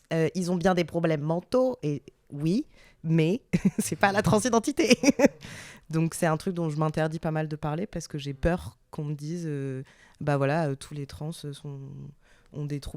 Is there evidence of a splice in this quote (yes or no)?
no